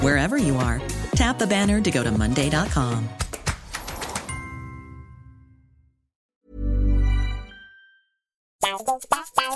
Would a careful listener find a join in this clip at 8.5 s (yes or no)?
yes